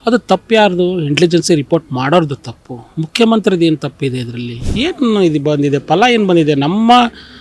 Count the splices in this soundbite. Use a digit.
1